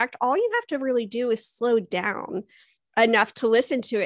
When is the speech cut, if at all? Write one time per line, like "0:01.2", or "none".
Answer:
none